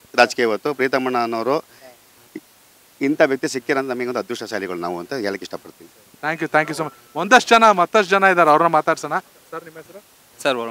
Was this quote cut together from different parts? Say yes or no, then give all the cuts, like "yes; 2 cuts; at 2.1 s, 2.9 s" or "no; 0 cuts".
no; 0 cuts